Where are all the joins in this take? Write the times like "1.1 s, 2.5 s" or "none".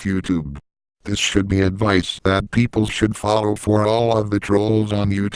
1.0 s